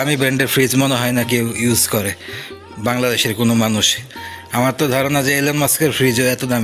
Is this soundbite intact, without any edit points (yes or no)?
yes